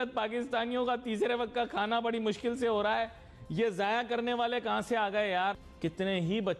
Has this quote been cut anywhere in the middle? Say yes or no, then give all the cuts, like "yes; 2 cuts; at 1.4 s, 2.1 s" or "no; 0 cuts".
yes; 1 cut; at 5.7 s